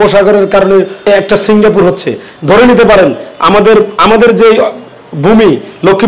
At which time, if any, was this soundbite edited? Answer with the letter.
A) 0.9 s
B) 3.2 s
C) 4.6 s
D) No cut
A